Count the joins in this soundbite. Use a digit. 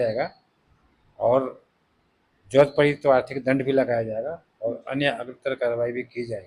0